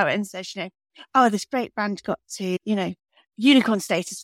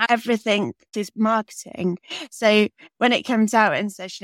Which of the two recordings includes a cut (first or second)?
second